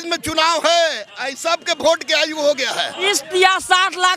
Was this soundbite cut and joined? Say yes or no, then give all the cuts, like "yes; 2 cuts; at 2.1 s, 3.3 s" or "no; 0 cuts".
yes; 1 cut; at 3.1 s